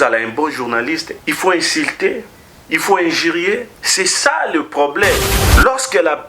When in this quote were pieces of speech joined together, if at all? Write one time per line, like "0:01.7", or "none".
0:01.1
0:03.8
0:05.4